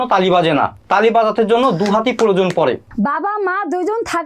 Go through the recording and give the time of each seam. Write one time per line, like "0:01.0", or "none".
0:02.9